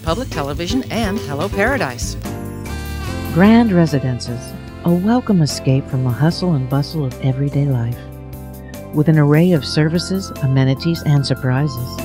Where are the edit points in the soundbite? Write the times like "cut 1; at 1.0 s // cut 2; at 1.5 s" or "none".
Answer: none